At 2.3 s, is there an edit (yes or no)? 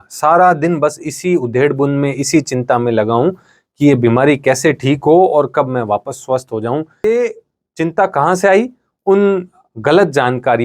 no